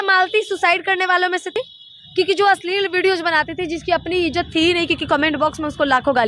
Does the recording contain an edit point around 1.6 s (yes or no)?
yes